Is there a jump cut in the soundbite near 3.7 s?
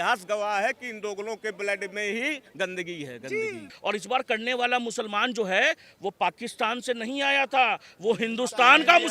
yes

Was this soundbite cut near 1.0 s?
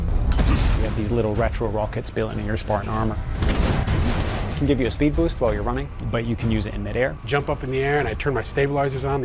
no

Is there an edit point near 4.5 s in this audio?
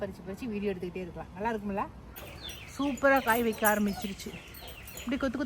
no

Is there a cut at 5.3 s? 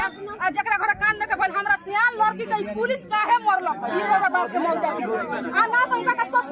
no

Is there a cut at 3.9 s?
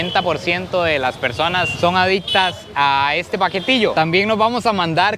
yes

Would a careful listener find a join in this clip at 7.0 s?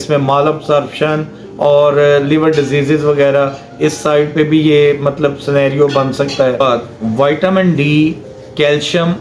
yes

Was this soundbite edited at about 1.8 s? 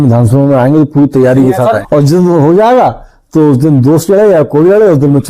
yes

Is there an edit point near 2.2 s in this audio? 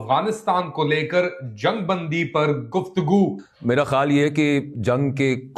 no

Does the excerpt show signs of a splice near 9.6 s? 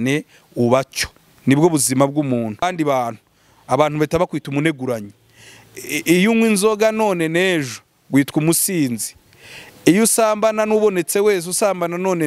no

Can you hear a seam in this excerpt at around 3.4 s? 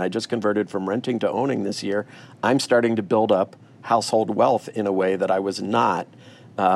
no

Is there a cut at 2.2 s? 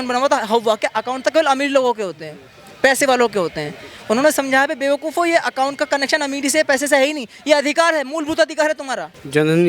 no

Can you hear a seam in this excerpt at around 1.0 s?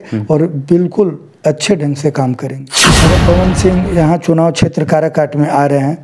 no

